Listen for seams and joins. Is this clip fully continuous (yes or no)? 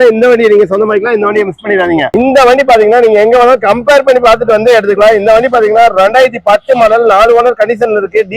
no